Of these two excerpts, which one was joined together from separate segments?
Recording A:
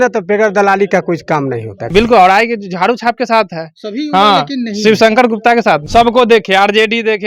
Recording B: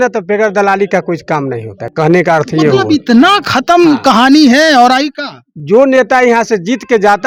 A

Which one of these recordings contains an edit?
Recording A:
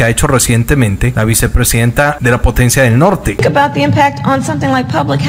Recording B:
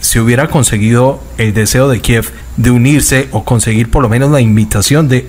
A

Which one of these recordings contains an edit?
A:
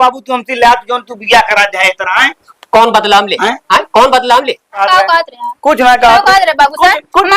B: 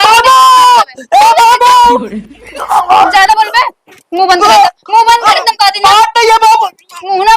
A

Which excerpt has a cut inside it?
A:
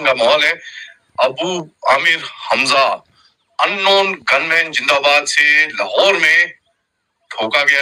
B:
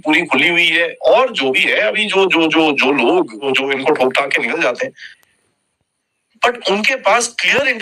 B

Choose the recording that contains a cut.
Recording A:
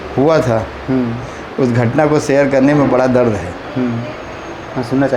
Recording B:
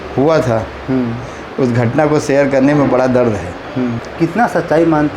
B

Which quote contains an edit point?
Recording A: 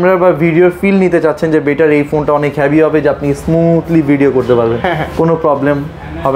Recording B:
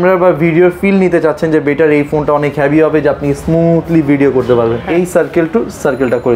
B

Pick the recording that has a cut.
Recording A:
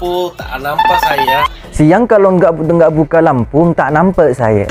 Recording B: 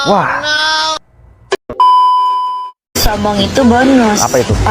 B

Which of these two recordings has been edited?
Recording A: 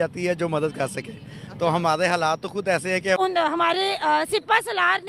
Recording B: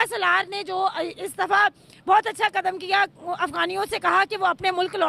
A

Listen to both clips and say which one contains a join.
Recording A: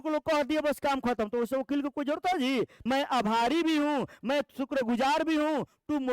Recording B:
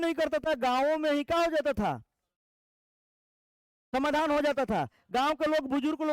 A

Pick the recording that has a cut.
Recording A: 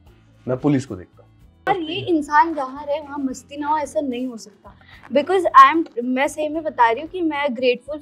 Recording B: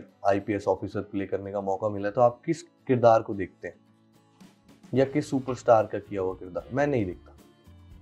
A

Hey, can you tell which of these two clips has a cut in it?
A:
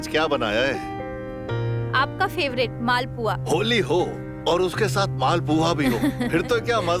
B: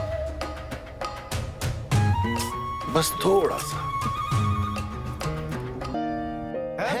B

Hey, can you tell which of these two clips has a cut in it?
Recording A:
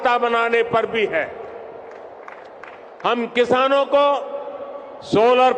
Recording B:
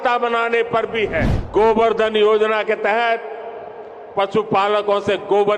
B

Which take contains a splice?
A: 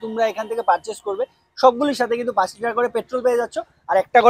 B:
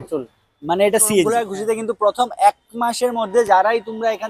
B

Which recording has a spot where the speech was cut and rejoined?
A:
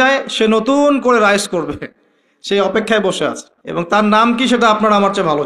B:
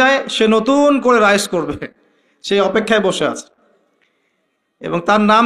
A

